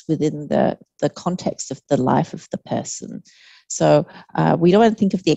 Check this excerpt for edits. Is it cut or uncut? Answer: uncut